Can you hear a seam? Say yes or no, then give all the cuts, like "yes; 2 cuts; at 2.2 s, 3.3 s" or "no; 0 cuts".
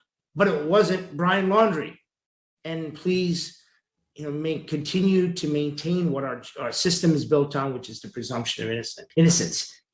yes; 1 cut; at 9.0 s